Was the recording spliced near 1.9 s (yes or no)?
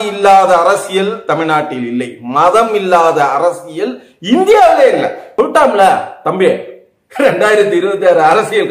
no